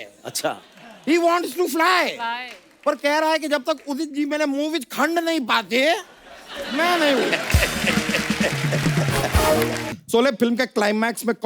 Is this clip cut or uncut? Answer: cut